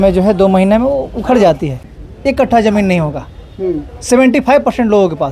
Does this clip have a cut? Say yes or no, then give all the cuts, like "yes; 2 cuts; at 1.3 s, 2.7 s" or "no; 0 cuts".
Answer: yes; 1 cut; at 1.8 s